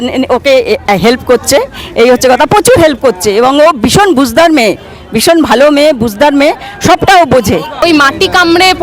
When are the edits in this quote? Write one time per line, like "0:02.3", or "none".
0:07.8